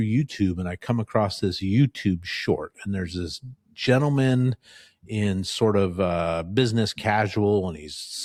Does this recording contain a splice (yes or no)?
no